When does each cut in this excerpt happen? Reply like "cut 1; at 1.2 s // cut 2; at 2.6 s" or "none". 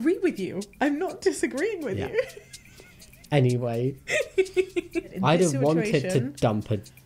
cut 1; at 5.1 s